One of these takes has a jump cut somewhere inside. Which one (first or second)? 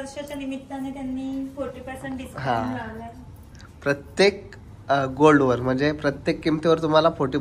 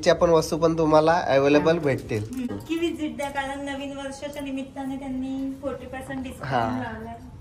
second